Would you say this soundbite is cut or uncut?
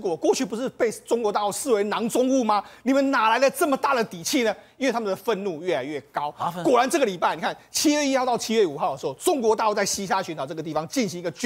uncut